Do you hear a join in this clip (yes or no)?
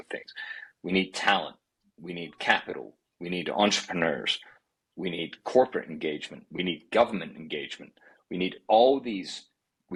no